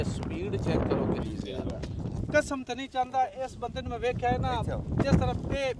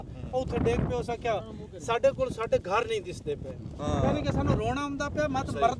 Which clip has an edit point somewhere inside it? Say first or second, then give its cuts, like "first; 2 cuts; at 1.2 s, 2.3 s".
first; 1 cut; at 2.1 s